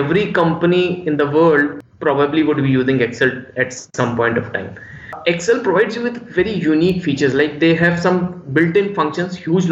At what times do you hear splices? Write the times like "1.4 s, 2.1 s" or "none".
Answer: 1.8 s, 5.1 s